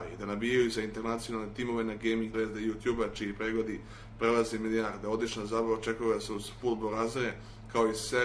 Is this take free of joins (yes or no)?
yes